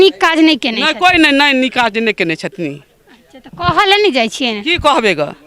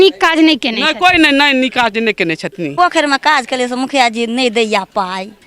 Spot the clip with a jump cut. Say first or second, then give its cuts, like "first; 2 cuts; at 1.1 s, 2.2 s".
second; 1 cut; at 2.7 s